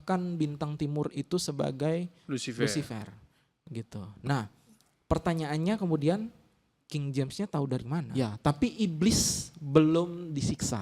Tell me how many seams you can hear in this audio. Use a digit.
1